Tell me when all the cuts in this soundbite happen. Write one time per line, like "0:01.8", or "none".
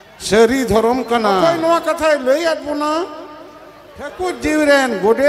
0:01.4
0:04.2